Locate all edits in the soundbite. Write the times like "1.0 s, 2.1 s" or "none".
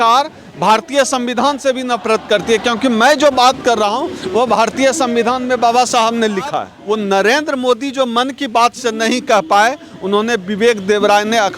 6.7 s